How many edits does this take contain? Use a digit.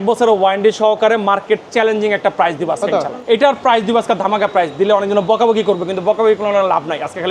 1